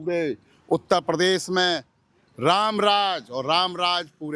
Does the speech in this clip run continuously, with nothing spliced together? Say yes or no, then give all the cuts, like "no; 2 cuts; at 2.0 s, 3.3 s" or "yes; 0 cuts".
yes; 0 cuts